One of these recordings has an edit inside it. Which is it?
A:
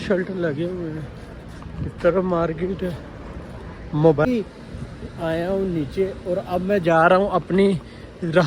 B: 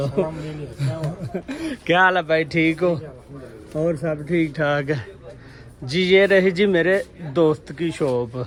A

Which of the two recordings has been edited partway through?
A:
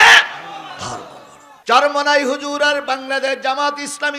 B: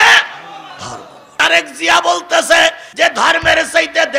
B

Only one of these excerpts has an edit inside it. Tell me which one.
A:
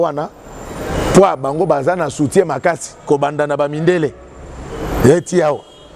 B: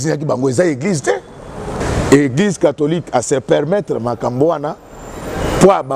B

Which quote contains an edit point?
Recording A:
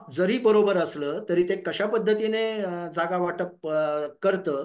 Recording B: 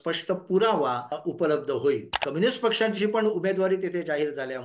B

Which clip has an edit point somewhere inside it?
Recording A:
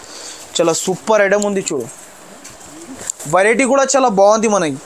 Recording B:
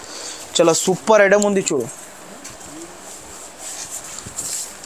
A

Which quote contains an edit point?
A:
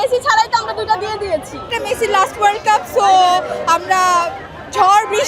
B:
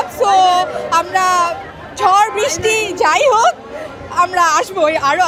A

